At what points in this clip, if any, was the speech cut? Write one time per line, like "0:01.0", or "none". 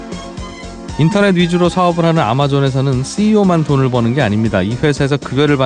0:01.0

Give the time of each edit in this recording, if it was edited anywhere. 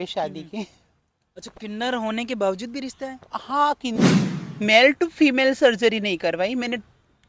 0:04.1

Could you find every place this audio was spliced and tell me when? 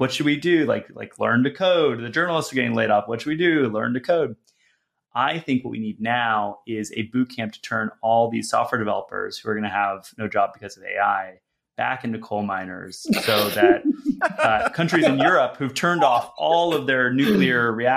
none

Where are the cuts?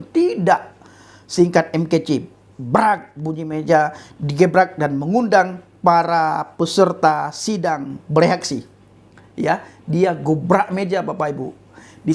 none

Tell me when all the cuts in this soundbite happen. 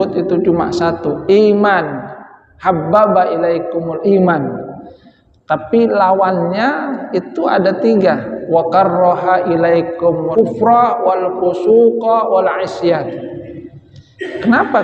0:10.3

